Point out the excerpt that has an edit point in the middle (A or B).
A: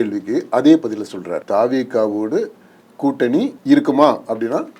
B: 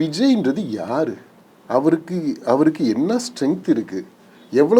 A